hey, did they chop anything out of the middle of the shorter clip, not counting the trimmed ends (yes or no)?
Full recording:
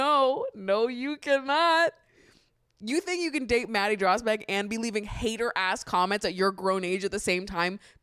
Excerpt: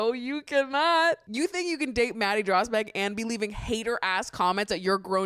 yes